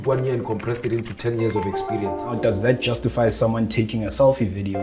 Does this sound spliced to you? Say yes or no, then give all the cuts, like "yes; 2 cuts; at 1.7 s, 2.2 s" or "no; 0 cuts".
yes; 1 cut; at 2.4 s